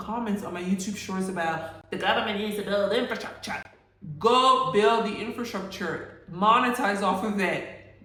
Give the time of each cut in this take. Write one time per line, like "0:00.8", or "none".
none